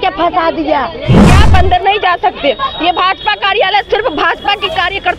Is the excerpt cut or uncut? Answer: cut